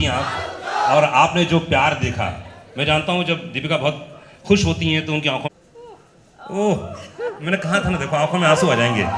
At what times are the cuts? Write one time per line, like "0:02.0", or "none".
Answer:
none